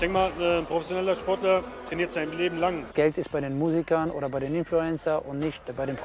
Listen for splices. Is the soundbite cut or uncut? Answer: cut